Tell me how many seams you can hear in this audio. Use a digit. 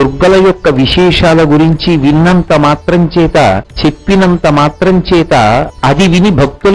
2